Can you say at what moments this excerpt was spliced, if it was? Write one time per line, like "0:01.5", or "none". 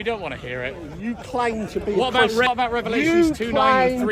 0:00.9
0:02.5